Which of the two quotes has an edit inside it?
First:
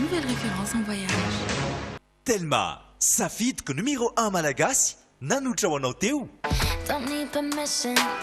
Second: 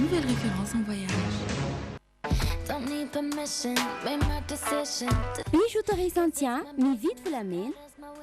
second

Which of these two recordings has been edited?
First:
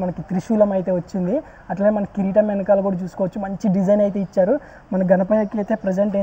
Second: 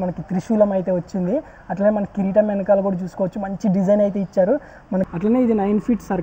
second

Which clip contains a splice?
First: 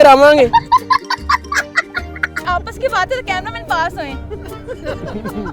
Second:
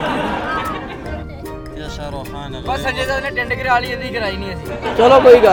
first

